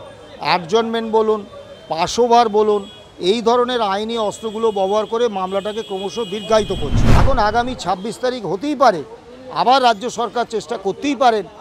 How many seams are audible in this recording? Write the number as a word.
one